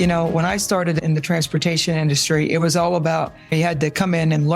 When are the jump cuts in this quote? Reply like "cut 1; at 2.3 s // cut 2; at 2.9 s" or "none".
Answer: cut 1; at 1.0 s // cut 2; at 3.5 s